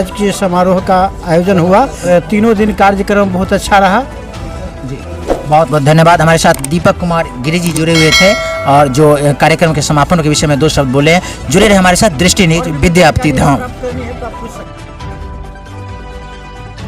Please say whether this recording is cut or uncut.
uncut